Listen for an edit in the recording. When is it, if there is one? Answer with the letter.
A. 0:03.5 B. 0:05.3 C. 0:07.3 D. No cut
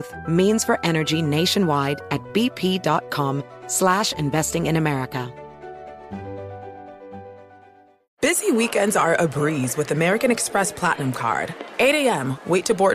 D